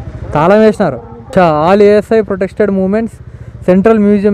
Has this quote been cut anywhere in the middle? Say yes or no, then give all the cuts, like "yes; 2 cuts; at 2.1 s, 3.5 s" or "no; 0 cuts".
yes; 1 cut; at 1.1 s